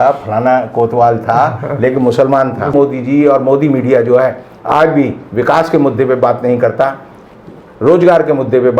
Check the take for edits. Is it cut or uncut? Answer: cut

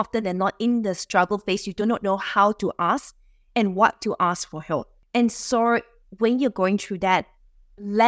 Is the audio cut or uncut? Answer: cut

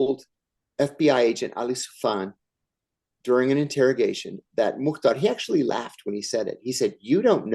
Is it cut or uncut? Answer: uncut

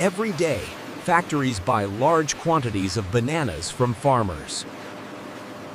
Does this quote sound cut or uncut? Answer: uncut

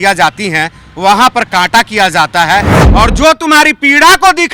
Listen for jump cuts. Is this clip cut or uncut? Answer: cut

